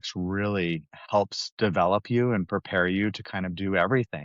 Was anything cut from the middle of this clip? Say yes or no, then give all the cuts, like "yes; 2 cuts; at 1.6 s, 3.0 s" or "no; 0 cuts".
yes; 1 cut; at 0.9 s